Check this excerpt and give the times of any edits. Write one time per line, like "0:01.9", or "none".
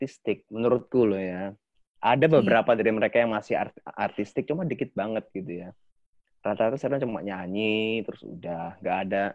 none